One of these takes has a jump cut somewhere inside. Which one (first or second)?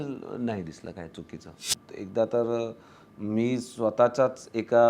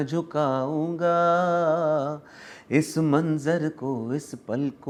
first